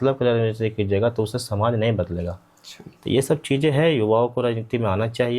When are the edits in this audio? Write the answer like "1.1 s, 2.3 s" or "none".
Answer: none